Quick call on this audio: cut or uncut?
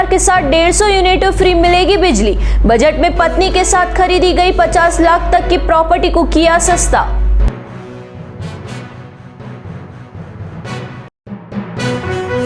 uncut